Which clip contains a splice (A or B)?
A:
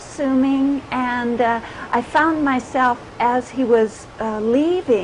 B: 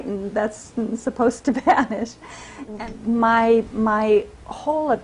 B